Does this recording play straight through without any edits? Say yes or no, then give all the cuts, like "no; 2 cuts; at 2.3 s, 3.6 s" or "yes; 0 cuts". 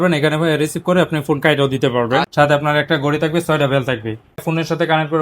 no; 2 cuts; at 2.3 s, 4.4 s